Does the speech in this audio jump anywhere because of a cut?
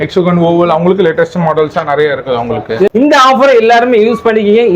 yes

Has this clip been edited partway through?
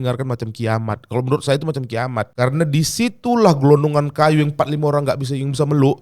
yes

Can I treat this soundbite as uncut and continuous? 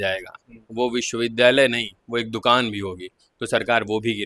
yes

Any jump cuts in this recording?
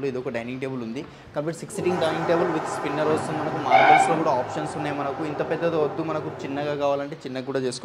no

